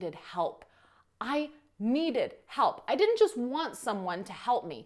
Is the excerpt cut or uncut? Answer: uncut